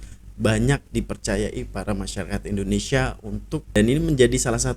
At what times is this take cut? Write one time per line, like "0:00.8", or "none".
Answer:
0:03.8